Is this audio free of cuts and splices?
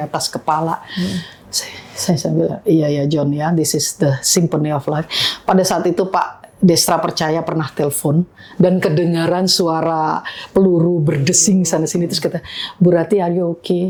yes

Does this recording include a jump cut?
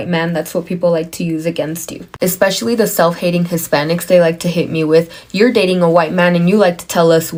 no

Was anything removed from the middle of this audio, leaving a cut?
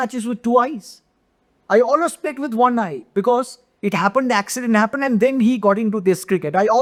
no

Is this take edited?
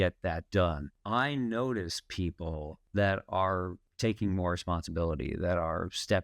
yes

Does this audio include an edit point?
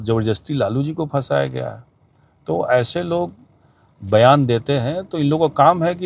no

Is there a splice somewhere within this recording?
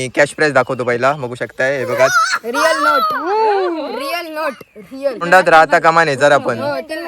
yes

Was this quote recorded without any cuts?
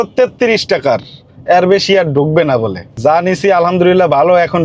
yes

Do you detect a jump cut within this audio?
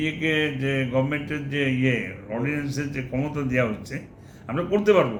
no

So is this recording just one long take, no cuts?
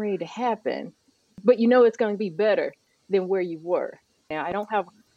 no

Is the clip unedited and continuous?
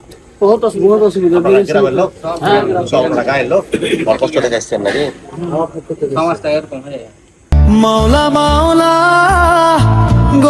no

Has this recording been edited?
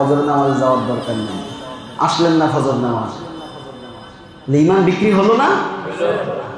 no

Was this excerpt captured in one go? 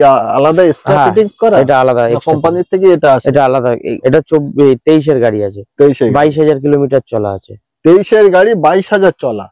no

